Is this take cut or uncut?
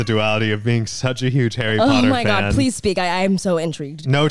uncut